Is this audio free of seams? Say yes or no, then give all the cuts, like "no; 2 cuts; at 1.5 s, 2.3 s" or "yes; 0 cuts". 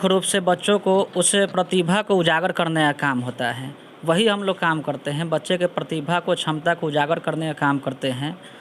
yes; 0 cuts